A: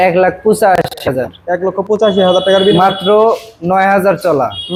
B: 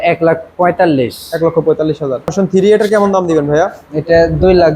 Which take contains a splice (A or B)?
B